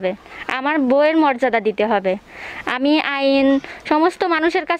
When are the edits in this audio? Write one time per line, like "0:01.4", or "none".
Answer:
none